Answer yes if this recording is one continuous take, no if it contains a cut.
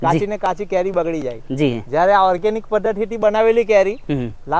yes